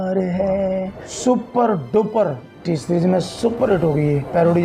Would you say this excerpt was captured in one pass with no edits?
no; 2 cuts; at 1.0 s, 2.5 s

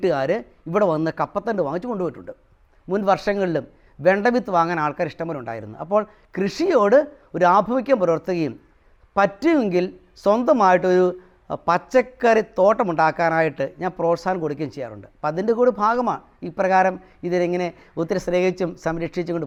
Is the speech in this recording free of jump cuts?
yes; 0 cuts

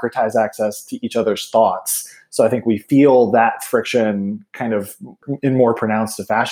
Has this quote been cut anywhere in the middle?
yes; 1 cut; at 5.2 s

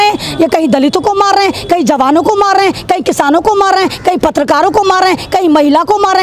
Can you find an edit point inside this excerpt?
no; 0 cuts

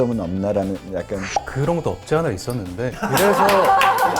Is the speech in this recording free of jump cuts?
no; 1 cut; at 1.5 s

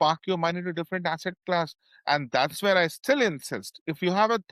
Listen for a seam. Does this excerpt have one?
no; 0 cuts

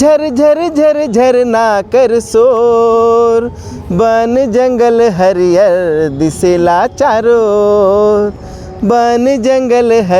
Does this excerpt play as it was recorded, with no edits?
yes; 0 cuts

